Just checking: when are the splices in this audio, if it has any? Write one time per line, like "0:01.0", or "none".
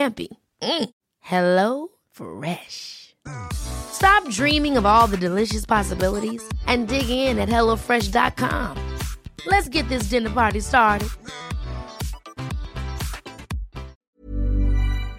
0:14.0